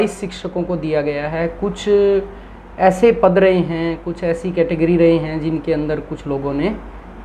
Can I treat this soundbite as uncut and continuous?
yes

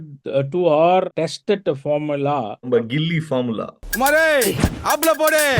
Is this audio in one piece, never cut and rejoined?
no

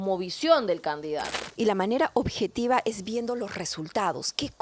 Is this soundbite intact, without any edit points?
no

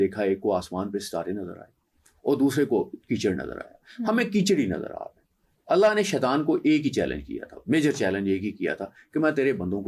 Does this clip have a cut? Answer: no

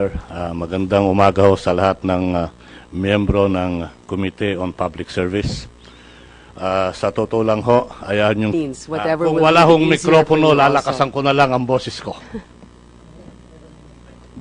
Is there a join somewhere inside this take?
no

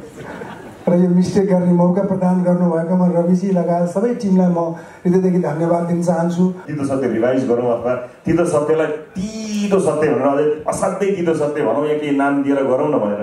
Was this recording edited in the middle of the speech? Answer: yes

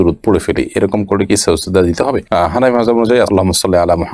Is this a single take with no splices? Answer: yes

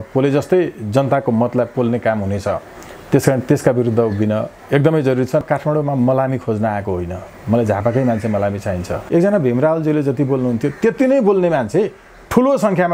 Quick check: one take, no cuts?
no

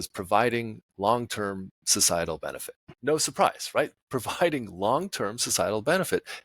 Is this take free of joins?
no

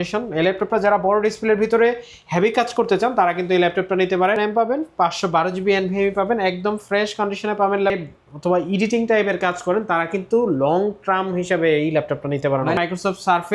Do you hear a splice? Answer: yes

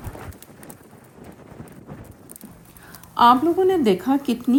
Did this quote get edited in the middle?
no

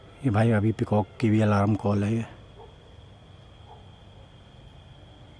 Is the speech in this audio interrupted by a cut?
no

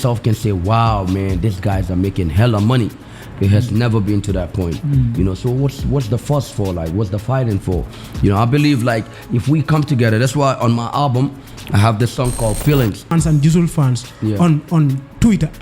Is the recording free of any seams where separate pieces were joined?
no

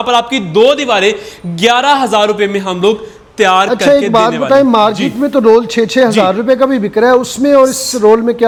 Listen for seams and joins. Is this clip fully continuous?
yes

